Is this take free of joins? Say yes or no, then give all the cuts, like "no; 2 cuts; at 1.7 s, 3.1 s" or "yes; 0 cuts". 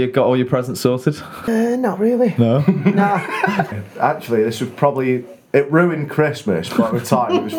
no; 2 cuts; at 1.5 s, 3.7 s